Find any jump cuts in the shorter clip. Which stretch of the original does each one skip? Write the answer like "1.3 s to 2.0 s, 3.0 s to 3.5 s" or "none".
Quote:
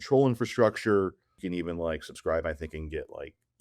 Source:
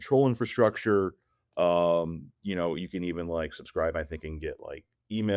1.4 s to 2.9 s